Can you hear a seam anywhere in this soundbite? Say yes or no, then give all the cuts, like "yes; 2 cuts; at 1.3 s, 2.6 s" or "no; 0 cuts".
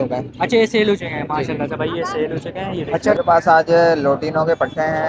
yes; 1 cut; at 2.9 s